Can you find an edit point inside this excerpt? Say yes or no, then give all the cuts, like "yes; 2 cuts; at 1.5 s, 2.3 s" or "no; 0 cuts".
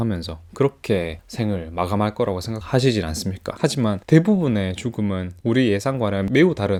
no; 0 cuts